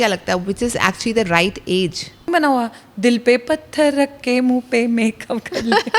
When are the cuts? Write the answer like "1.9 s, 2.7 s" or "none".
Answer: 2.3 s